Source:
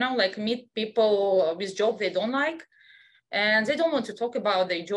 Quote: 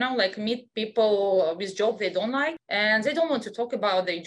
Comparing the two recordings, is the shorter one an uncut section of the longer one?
no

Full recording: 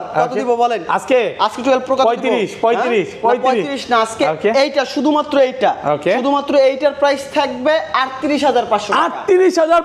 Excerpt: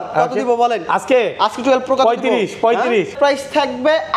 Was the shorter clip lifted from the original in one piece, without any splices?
no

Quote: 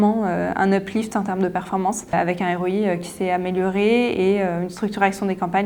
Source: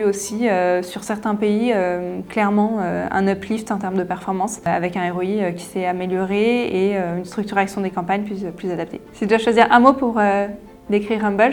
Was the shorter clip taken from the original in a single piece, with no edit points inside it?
yes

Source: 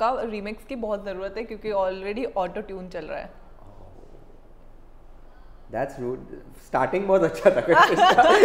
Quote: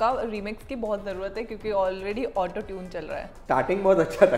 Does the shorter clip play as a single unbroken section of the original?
no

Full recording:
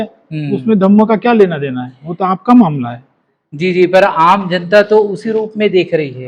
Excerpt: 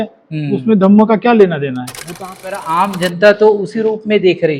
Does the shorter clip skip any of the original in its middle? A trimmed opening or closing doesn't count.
yes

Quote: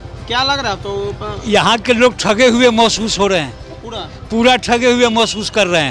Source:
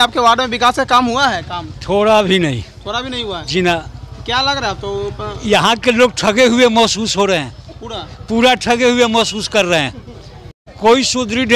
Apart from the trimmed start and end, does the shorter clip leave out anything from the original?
no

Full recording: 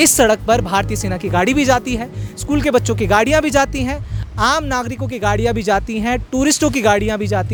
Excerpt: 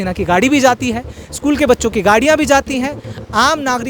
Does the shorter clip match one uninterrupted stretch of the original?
yes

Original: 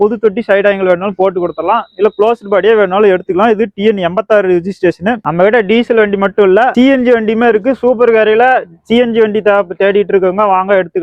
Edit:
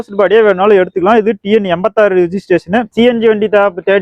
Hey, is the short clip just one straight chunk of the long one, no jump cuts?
no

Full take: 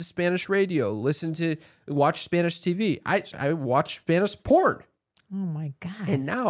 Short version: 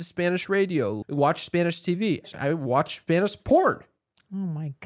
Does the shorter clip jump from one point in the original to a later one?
yes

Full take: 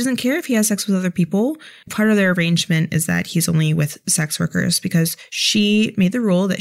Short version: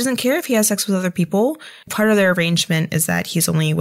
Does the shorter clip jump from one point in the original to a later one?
no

